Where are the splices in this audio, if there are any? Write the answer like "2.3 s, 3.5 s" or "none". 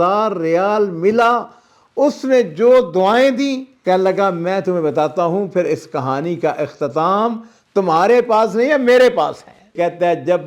3.7 s, 9.7 s